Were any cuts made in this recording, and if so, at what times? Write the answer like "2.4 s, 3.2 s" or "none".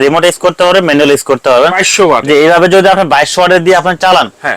1.8 s